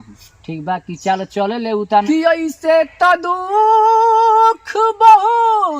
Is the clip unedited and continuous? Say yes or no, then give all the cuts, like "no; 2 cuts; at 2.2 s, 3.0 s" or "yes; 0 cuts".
no; 1 cut; at 2.0 s